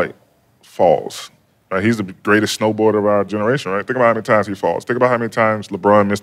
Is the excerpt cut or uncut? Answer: uncut